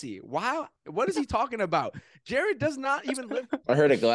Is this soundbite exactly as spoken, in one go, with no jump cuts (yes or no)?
no